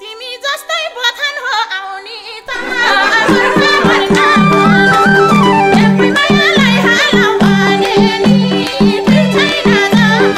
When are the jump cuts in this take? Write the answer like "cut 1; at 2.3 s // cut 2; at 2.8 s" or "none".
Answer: none